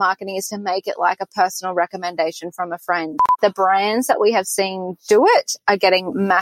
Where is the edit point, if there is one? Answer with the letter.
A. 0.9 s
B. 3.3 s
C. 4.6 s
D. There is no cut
B